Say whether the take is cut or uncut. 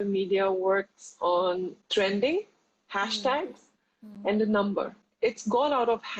cut